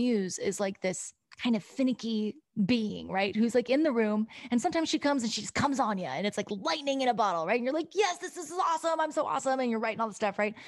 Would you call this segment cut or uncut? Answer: cut